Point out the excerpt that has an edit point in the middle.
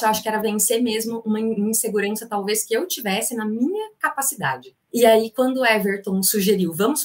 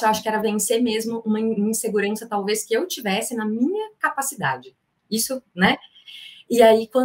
first; 1 cut; at 4.7 s

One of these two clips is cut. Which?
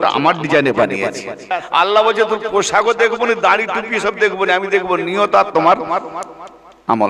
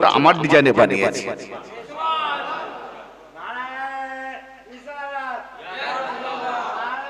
first; 1 cut; at 1.4 s

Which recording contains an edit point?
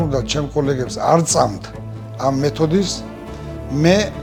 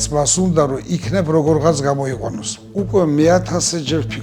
second; 1 cut; at 2.6 s

